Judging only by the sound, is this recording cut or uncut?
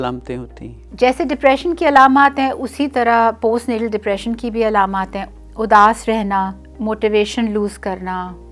cut